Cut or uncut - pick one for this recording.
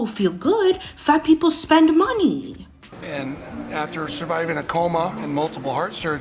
cut